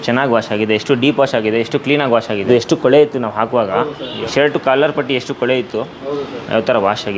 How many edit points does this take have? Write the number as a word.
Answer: two